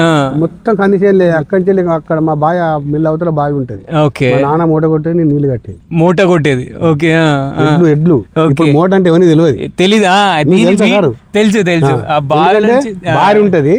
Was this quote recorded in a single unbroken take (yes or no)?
yes